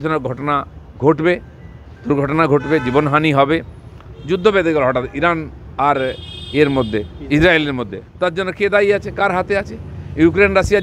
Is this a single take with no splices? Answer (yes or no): yes